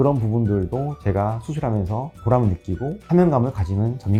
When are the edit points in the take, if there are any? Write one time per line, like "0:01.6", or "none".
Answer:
none